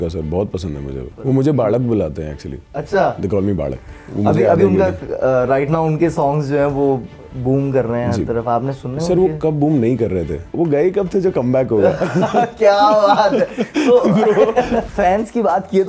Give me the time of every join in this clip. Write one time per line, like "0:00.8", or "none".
0:01.1
0:10.4
0:14.9